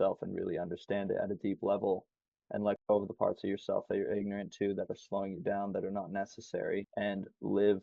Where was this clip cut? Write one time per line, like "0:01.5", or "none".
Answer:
0:06.9